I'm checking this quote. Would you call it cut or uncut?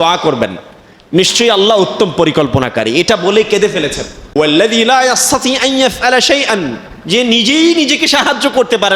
cut